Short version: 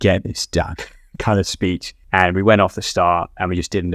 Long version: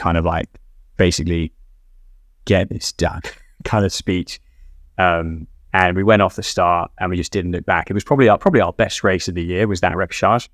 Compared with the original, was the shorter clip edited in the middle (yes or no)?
yes